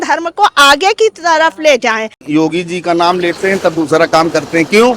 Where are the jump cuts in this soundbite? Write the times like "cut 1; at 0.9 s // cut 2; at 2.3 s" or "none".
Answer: cut 1; at 2.2 s